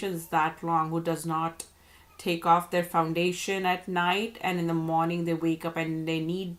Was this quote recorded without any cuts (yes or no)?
yes